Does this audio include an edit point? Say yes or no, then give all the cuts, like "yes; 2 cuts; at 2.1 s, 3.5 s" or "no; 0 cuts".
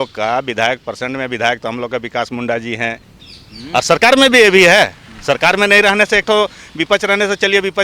yes; 1 cut; at 3.1 s